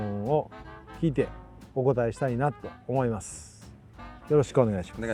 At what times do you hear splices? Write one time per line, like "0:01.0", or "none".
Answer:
none